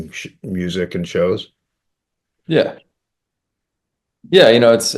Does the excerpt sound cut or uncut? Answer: uncut